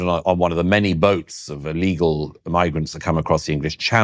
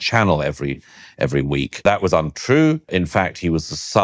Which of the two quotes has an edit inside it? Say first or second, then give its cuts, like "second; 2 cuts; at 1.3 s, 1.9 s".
second; 2 cuts; at 1.8 s, 2.9 s